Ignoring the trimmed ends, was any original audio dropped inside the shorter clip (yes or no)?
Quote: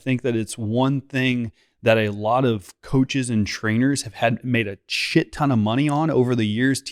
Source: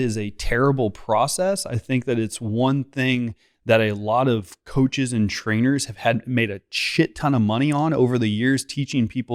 no